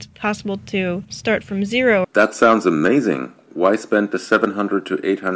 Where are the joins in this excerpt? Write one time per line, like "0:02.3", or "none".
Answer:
0:01.1
0:02.1